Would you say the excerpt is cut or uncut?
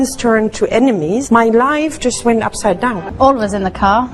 cut